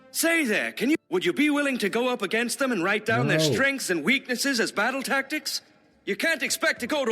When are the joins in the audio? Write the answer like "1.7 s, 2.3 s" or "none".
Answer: 1.0 s